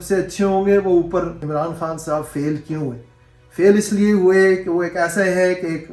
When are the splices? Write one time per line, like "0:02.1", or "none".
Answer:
0:01.4